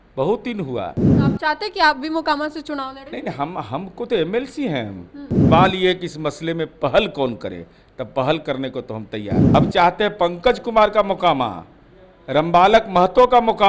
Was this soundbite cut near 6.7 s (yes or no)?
no